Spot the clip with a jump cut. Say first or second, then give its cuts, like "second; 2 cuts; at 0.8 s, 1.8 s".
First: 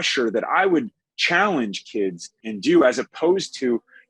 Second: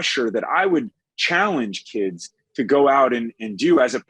first; 1 cut; at 2.4 s